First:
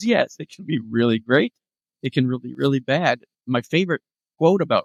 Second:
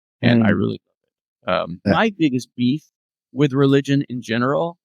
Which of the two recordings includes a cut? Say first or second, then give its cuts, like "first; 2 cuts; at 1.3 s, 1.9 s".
second; 1 cut; at 1.9 s